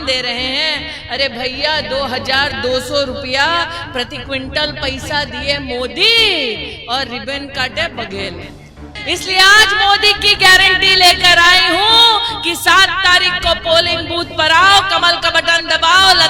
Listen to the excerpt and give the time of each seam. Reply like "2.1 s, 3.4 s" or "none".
8.9 s